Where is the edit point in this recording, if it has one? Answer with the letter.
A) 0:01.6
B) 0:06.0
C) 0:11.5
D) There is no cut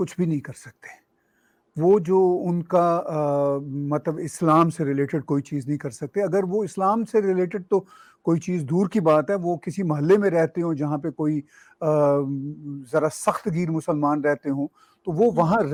D